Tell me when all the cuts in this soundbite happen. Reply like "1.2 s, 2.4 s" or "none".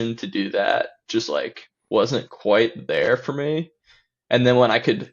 none